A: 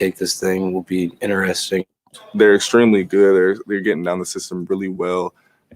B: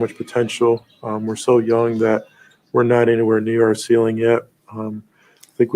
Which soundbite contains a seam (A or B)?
A